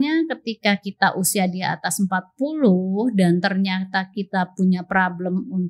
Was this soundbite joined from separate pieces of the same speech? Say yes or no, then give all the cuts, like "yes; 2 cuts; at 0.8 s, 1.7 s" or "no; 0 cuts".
no; 0 cuts